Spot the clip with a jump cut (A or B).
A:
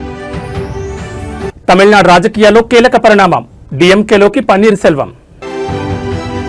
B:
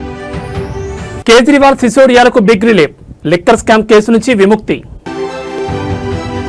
A